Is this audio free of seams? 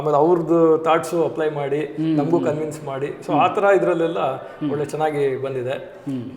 yes; 0 cuts

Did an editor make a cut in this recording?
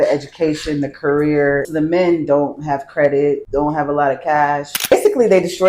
yes; 3 cuts; at 1.7 s, 3.4 s, 4.9 s

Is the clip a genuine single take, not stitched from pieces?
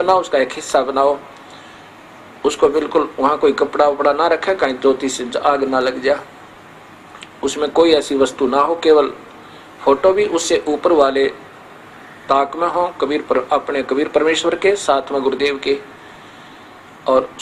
yes; 0 cuts

